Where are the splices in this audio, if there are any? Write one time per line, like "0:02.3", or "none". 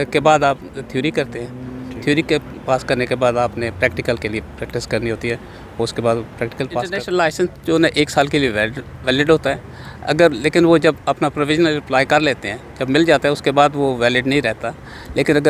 0:07.0